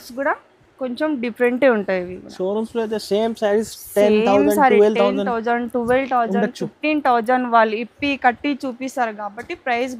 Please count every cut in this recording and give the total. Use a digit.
0